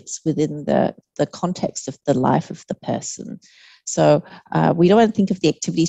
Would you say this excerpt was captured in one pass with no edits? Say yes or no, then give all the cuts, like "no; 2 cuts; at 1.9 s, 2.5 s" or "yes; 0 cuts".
yes; 0 cuts